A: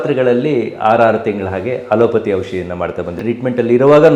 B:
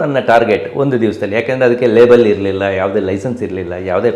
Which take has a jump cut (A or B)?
A